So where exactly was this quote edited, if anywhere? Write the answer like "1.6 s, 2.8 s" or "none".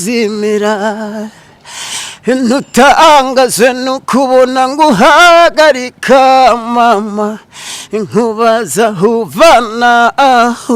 none

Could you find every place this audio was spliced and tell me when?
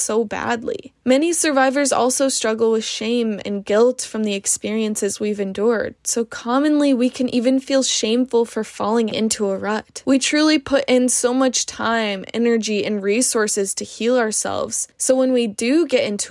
9.1 s

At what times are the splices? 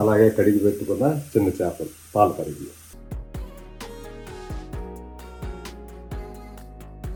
none

